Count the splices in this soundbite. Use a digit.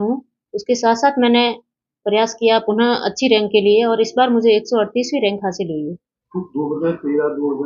0